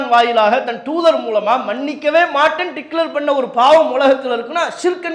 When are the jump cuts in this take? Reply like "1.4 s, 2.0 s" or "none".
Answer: none